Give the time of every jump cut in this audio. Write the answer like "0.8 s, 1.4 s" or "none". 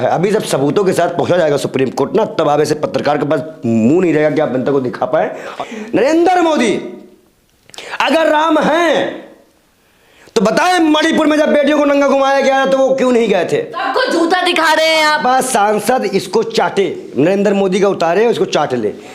5.5 s, 13.8 s